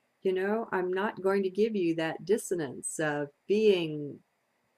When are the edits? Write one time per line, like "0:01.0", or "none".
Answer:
0:03.4